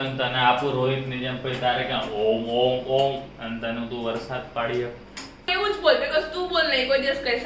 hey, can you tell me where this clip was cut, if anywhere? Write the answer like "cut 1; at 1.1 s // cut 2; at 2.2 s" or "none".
cut 1; at 5.5 s